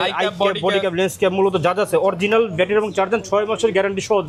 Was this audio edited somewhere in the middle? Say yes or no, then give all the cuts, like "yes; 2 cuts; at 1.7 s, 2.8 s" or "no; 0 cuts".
no; 0 cuts